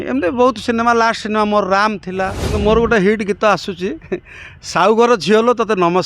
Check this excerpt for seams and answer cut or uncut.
cut